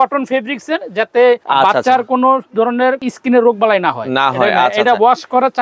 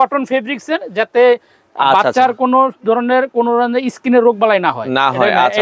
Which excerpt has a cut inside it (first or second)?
first